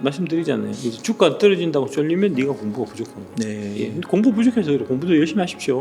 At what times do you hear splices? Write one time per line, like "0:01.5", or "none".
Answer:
none